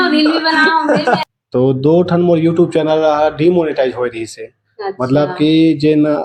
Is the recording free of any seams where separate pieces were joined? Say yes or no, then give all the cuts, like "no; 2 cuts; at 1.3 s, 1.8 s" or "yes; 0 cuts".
no; 1 cut; at 1.2 s